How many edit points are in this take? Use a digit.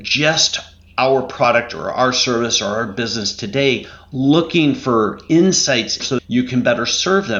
1